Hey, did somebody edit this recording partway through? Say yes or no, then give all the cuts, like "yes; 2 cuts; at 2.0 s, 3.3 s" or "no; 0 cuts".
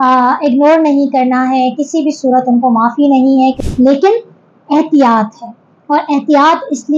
yes; 1 cut; at 3.6 s